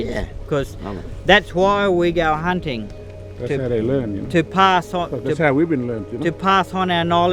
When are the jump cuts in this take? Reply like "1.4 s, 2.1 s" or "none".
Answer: none